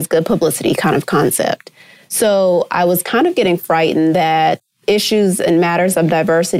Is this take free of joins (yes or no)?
yes